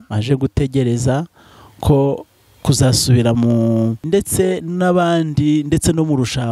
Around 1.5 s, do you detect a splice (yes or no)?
no